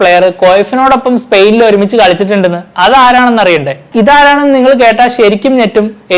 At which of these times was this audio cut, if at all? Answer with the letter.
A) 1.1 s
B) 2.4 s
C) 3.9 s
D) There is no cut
C